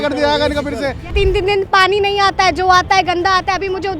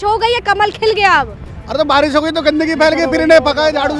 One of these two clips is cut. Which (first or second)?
first